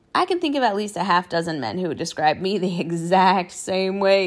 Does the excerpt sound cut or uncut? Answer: uncut